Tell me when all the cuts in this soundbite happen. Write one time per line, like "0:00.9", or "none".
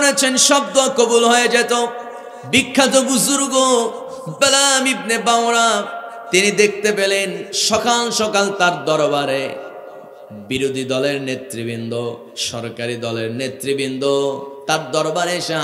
none